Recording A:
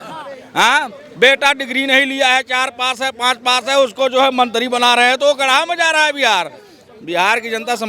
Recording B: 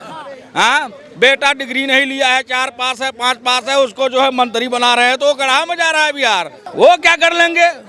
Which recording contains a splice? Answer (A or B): B